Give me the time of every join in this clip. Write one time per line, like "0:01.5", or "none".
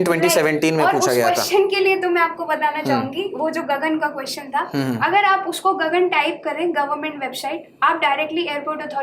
none